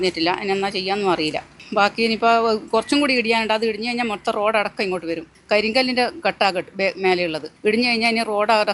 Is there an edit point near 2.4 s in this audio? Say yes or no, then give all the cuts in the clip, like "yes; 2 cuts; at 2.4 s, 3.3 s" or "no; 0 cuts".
no; 2 cuts; at 5.3 s, 7.5 s